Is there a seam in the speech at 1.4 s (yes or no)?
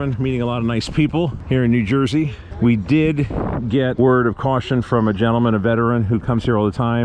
yes